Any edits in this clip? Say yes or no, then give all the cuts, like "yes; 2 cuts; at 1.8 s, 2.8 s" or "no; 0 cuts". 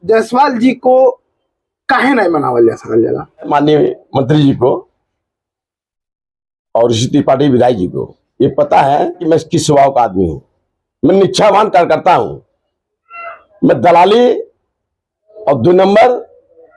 yes; 2 cuts; at 3.5 s, 9.2 s